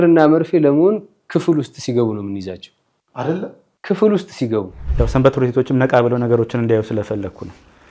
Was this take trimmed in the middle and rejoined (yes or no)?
yes